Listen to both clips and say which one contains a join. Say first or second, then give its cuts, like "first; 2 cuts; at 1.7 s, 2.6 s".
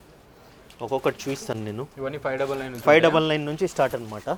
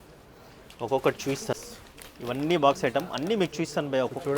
second; 1 cut; at 1.6 s